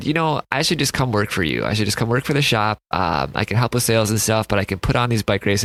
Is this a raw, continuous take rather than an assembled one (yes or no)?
yes